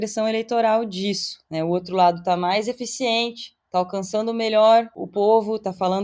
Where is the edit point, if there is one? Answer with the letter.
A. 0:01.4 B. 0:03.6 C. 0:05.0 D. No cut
C